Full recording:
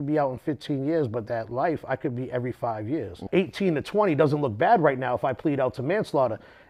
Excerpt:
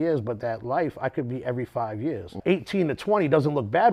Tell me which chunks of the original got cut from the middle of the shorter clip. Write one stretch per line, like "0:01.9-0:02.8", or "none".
none